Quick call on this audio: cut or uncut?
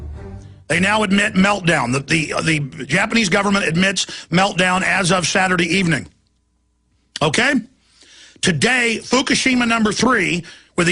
cut